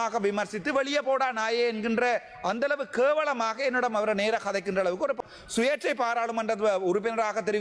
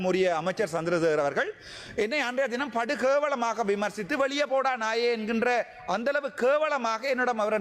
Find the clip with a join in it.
first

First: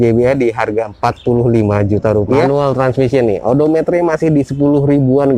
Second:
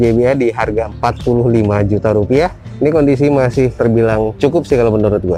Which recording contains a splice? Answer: first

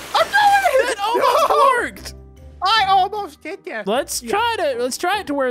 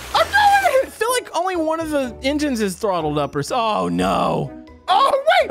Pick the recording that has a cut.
second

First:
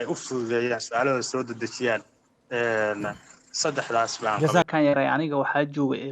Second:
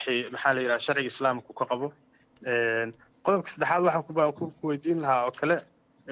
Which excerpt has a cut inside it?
first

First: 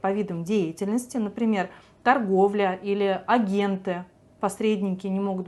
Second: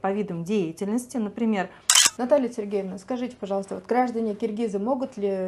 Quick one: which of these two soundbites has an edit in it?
second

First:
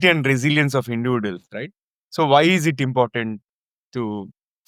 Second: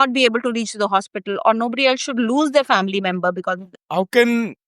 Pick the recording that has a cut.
second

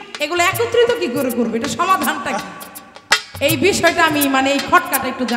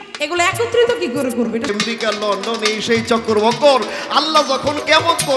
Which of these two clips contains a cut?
second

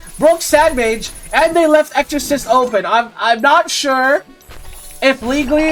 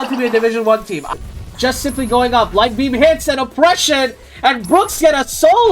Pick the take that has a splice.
second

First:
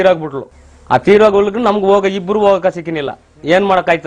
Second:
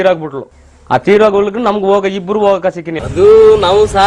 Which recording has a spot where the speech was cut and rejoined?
second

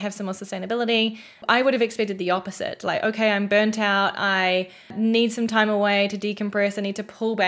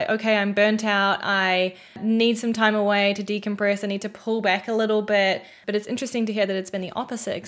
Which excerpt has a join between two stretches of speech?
first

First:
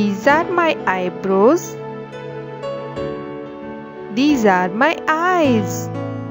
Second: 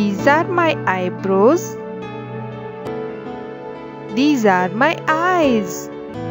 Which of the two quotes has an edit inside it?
first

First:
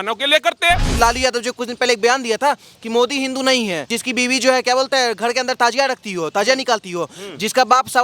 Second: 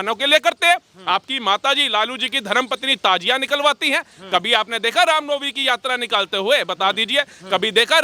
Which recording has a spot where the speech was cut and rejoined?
first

